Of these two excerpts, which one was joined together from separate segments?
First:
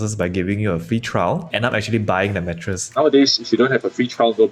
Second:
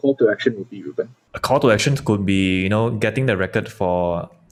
first; 2 cuts; at 1.5 s, 3.0 s

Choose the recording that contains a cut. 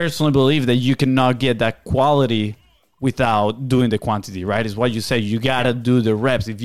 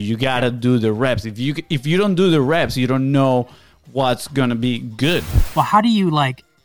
second; 1 cut; at 5.4 s

